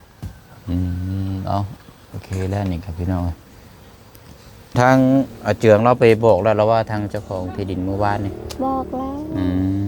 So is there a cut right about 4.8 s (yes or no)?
yes